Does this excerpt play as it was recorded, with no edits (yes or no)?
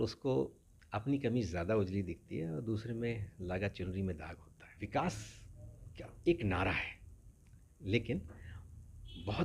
no